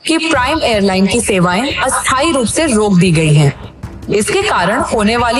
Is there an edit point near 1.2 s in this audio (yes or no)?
no